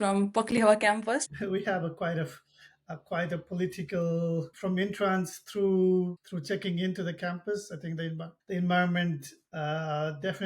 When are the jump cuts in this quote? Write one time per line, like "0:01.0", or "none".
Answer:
0:01.3
0:04.5
0:06.3
0:08.3